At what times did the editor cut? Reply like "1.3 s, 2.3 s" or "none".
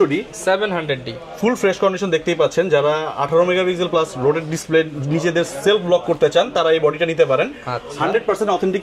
none